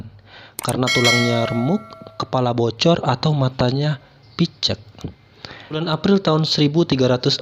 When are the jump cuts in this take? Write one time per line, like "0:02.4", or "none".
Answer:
0:05.8